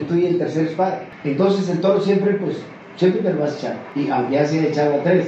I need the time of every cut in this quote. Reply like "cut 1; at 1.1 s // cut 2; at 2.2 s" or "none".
cut 1; at 1.1 s // cut 2; at 3.8 s